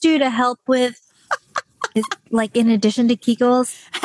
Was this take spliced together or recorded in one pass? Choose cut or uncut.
uncut